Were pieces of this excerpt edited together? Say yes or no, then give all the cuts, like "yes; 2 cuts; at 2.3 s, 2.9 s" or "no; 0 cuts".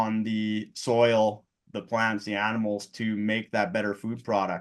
no; 0 cuts